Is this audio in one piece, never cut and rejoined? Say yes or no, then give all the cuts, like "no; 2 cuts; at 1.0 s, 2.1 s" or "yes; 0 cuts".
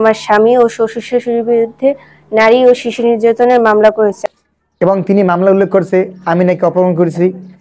no; 1 cut; at 4.2 s